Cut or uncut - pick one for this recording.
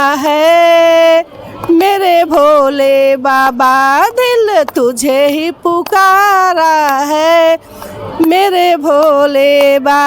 uncut